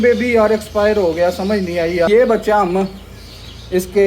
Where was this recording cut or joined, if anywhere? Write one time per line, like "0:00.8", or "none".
0:02.1